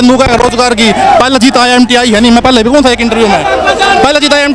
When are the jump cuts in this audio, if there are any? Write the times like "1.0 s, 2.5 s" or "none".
none